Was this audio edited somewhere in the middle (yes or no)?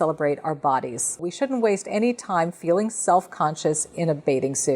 yes